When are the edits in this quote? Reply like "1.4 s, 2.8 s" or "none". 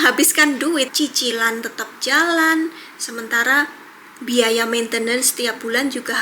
0.9 s